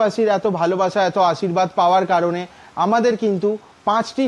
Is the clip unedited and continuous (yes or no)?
yes